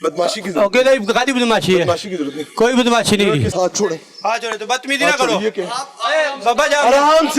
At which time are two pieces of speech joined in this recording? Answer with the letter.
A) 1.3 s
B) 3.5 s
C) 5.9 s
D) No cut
B